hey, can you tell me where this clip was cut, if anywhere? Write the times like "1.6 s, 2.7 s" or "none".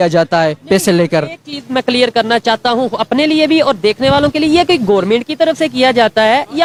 none